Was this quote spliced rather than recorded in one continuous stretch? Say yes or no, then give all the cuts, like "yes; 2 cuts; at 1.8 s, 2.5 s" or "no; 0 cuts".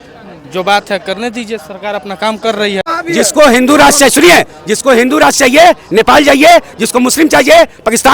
yes; 1 cut; at 3.0 s